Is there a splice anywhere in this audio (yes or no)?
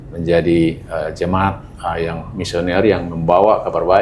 no